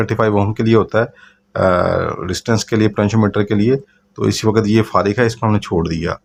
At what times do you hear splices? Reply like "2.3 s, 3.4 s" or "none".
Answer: none